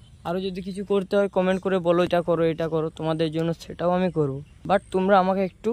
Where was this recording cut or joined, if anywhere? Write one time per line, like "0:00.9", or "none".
0:02.1
0:04.5